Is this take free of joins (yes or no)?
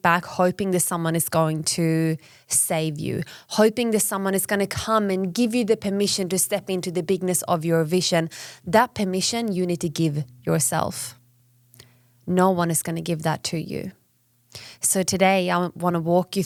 yes